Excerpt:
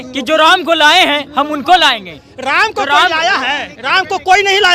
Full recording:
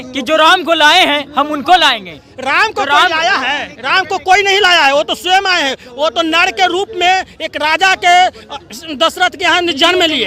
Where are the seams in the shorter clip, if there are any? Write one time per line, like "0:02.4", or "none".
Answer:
none